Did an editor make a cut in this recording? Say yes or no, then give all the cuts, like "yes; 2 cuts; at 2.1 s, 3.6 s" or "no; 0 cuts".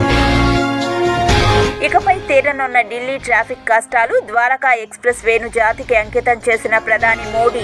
yes; 1 cut; at 1.2 s